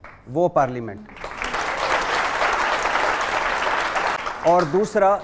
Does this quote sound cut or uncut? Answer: cut